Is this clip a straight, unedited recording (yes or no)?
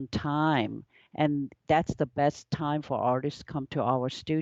yes